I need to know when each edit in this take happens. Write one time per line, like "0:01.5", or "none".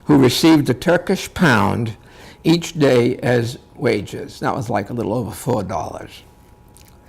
0:06.0